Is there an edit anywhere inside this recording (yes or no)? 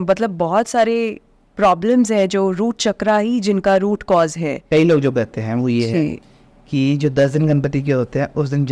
yes